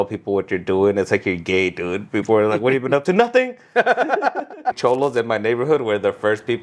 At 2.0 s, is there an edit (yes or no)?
no